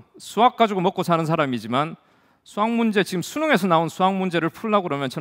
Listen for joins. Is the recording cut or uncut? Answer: uncut